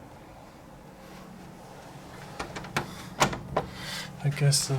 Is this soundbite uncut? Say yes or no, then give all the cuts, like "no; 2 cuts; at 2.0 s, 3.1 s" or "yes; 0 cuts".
yes; 0 cuts